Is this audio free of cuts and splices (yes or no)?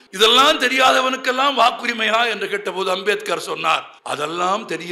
no